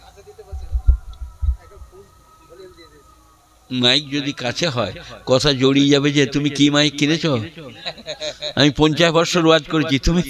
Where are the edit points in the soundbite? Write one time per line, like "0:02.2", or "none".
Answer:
none